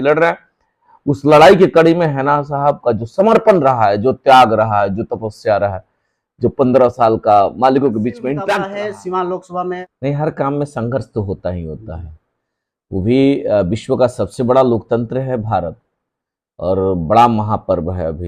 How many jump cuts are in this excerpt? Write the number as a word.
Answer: two